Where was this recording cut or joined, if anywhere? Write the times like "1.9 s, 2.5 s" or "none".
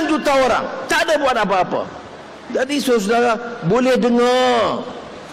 none